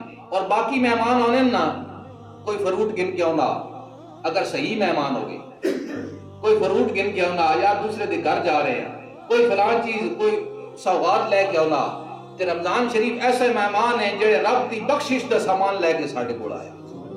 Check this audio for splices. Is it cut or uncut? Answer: uncut